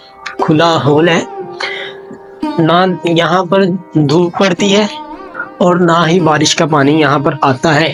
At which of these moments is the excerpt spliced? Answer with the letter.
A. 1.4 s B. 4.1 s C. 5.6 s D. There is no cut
D